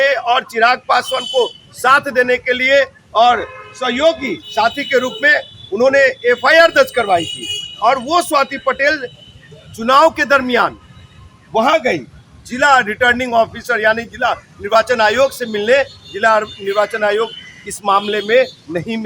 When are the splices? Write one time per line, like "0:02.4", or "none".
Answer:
none